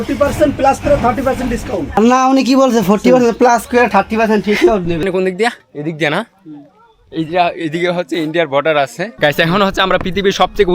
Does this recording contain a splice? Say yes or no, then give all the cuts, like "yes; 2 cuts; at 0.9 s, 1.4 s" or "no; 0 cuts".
yes; 3 cuts; at 2.0 s, 5.0 s, 9.1 s